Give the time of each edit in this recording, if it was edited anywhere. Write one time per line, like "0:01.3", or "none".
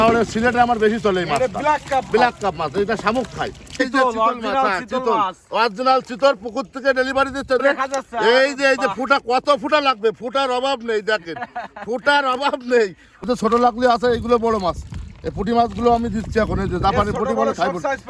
0:03.8
0:07.6
0:13.2